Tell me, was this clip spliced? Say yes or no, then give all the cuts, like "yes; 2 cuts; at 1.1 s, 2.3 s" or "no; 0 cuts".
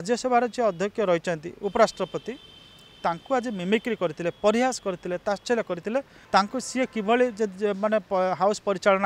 yes; 1 cut; at 6.2 s